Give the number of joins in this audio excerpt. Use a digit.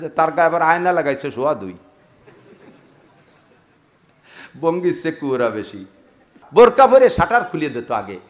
1